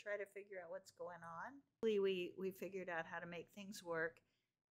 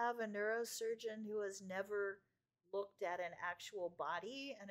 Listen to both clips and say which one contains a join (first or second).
first